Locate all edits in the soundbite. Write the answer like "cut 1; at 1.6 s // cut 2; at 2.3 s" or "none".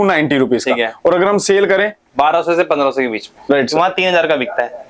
cut 1; at 3.4 s